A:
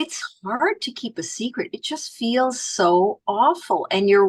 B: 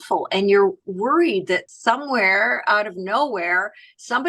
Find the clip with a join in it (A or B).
B